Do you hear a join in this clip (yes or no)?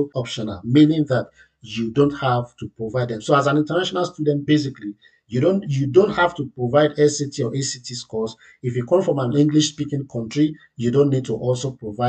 no